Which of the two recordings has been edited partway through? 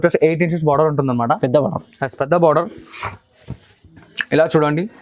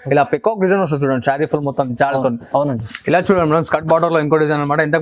second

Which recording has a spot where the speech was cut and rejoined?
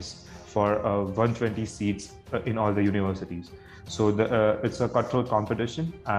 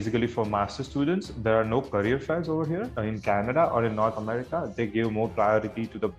second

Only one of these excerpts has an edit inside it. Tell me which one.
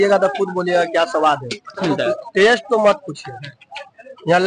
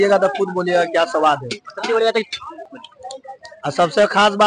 first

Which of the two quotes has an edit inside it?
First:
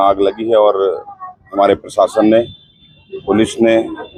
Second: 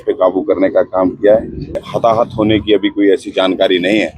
second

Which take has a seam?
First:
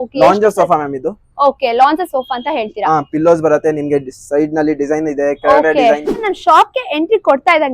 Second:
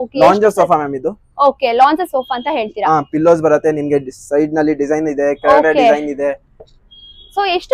first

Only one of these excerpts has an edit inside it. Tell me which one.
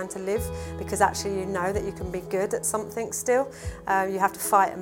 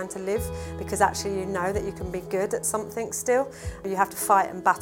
second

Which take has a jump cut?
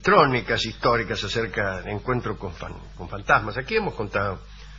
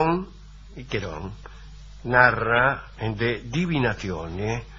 first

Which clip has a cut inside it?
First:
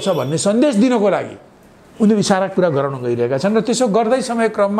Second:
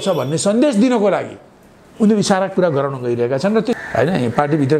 second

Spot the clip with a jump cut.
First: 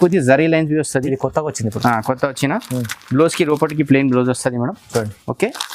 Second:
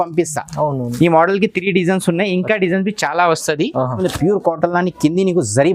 second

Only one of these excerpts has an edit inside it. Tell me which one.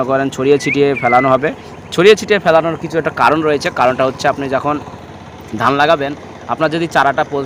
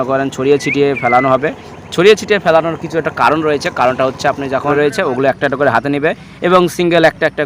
second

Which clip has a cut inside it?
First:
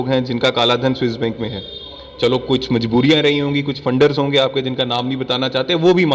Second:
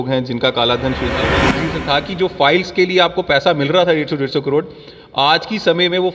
second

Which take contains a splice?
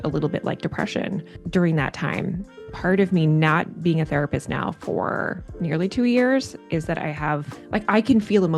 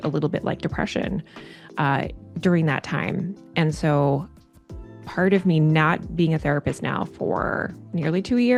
first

